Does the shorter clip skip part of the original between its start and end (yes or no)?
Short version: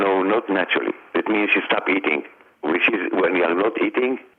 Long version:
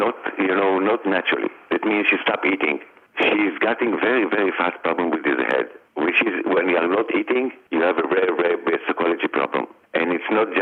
yes